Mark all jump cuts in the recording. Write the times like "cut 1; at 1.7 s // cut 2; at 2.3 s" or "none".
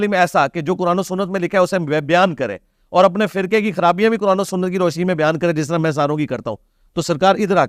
none

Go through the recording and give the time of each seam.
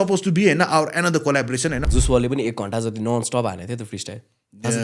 cut 1; at 1.9 s

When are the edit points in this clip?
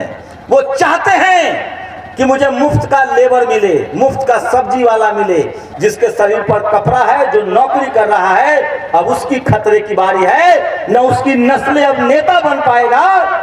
cut 1; at 5.6 s

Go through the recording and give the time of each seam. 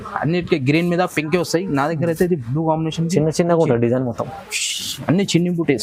none

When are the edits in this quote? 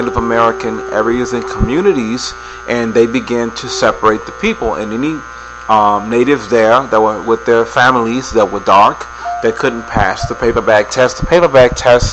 cut 1; at 4.5 s

